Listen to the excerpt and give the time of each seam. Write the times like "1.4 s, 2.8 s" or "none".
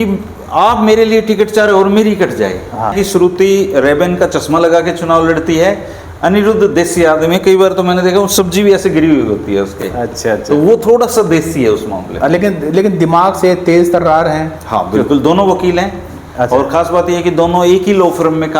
2.9 s